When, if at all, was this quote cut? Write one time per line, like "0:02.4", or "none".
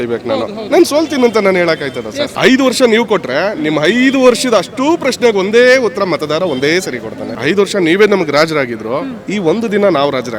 0:02.3
0:07.3